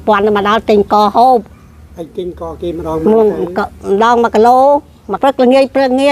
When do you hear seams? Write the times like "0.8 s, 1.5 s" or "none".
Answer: 5.2 s

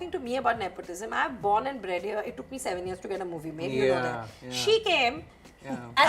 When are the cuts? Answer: none

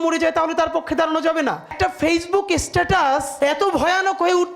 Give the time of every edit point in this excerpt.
1.7 s, 3.3 s

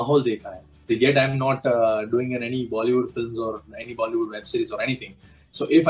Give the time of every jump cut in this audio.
0.9 s

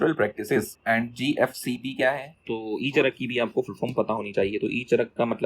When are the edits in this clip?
2.4 s

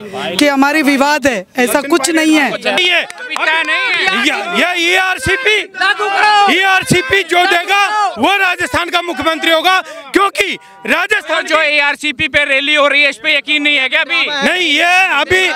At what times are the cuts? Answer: 2.8 s

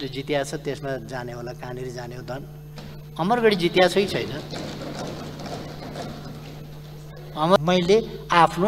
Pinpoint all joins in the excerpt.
7.6 s

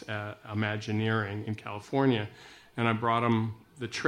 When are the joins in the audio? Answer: 1.4 s

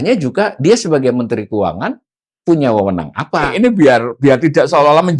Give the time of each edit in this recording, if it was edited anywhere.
3.5 s

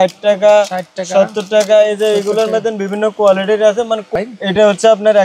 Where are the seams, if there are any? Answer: 4.1 s

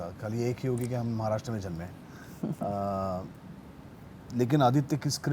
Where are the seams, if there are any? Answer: none

